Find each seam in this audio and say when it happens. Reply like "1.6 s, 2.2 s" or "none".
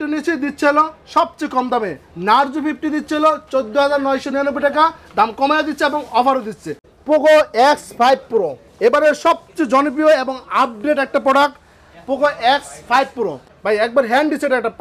6.9 s, 13.5 s